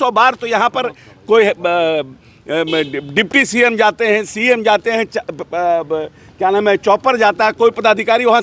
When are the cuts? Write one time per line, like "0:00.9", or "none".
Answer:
none